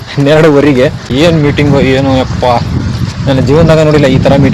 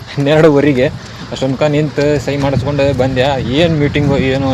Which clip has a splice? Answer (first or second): first